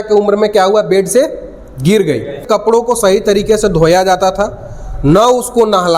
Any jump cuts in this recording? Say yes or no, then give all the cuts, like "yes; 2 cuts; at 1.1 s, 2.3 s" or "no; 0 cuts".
yes; 1 cut; at 2.5 s